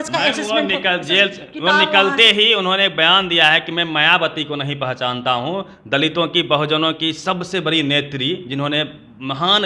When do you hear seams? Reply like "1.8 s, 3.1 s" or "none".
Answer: none